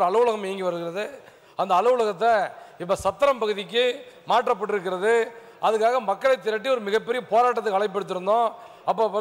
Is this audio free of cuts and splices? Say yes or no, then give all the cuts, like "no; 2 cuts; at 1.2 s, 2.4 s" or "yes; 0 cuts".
yes; 0 cuts